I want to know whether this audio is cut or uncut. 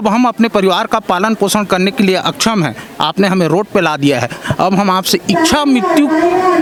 uncut